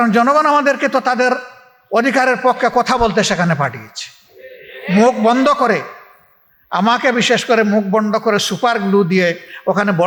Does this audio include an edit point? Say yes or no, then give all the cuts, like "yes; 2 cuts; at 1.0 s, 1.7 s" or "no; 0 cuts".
no; 0 cuts